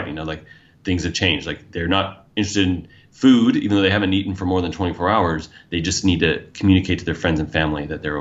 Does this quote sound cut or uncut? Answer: uncut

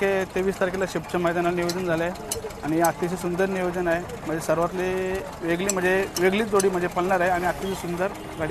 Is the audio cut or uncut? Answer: uncut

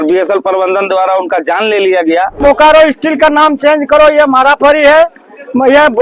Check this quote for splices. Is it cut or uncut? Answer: cut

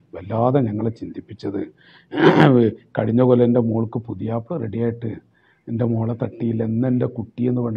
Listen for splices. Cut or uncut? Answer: uncut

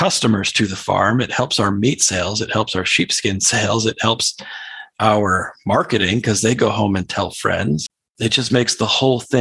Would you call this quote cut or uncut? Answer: cut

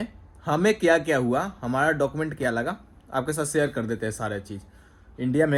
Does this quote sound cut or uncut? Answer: uncut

